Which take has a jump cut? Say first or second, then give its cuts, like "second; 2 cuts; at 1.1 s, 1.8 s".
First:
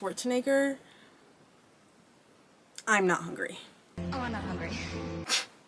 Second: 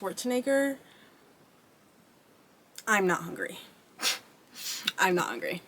second; 1 cut; at 4.0 s